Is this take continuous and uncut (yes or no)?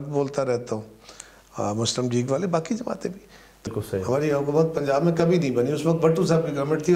no